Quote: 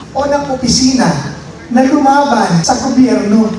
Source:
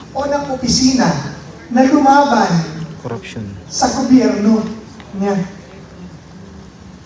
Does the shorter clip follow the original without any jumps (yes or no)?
no